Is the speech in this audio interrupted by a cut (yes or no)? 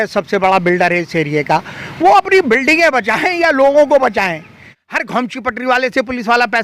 yes